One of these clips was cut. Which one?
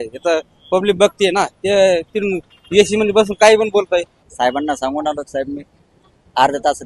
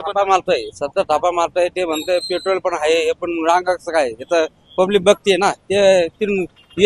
first; 1 cut; at 4.2 s

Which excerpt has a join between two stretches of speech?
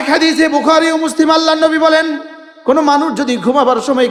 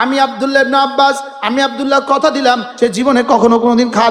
second; 1 cut; at 2.7 s

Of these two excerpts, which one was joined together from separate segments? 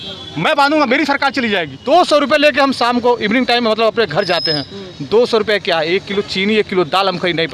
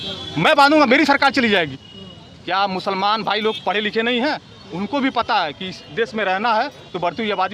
first; 1 cut; at 1.7 s

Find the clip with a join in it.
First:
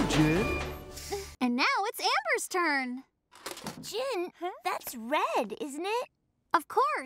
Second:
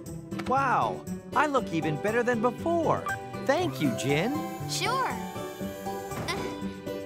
first; 1 cut; at 1.3 s

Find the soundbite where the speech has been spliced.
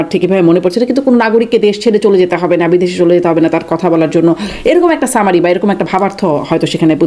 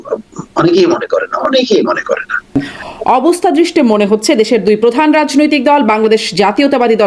second; 1 cut; at 2.7 s

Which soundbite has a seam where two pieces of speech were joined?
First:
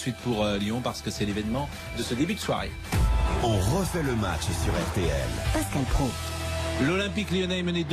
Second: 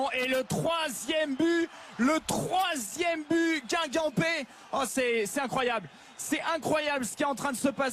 first; 1 cut; at 1.2 s

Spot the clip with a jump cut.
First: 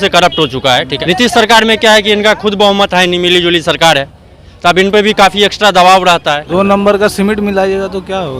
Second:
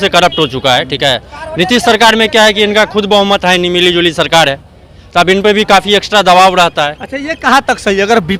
first; 2 cuts; at 0.9 s, 6.4 s

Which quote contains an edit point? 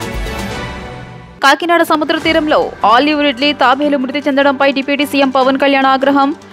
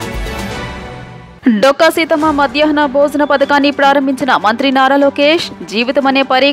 first; 1 cut; at 1.2 s

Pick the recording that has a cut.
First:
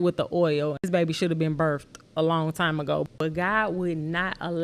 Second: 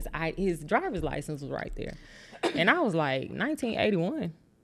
first; 2 cuts; at 0.8 s, 3.1 s

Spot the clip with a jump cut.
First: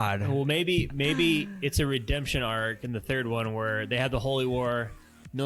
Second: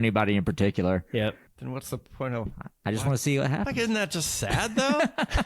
second; 1 cut; at 1.5 s

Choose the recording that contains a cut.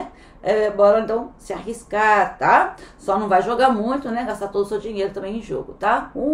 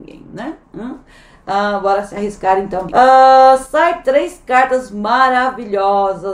second; 1 cut; at 2.9 s

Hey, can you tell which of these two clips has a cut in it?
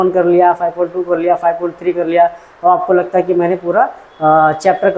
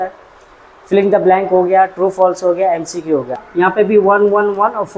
second; 1 cut; at 3.4 s

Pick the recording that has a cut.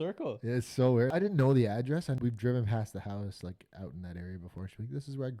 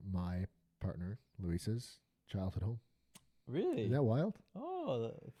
first; 2 cuts; at 1.1 s, 2.2 s

